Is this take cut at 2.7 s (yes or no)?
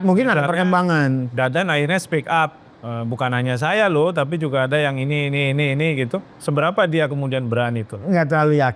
no